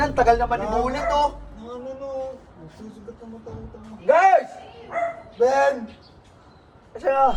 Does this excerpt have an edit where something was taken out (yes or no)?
no